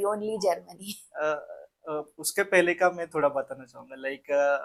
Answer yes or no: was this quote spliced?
no